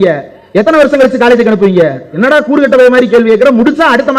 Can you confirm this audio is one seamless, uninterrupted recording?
no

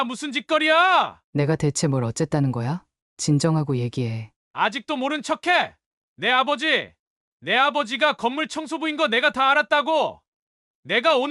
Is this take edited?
yes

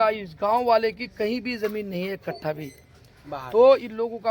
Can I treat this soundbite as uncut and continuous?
yes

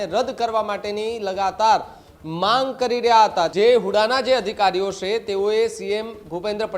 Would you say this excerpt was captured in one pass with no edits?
no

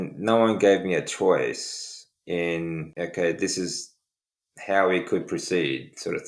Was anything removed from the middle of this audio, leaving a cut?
yes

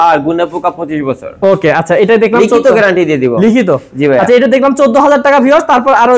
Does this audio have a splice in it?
no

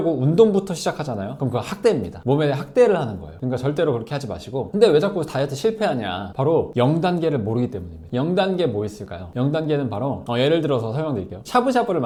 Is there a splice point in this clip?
no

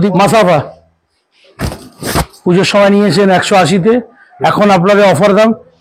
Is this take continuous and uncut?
yes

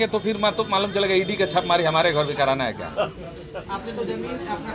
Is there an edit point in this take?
no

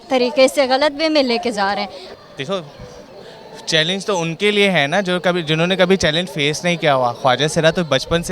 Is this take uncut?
no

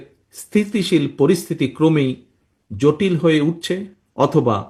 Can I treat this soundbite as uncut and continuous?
yes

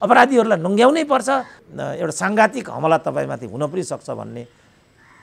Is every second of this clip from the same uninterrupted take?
no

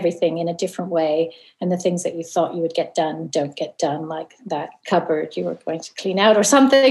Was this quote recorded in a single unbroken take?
no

